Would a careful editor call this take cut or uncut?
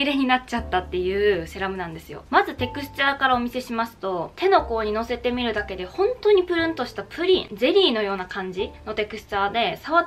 uncut